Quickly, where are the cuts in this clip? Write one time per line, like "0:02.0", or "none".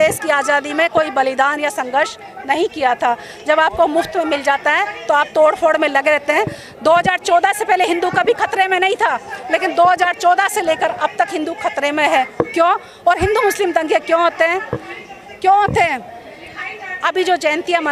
none